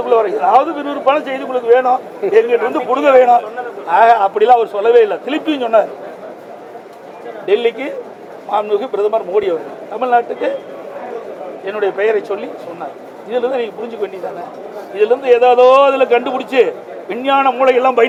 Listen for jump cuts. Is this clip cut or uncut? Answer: uncut